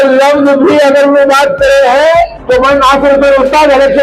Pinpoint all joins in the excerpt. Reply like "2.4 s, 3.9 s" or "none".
2.4 s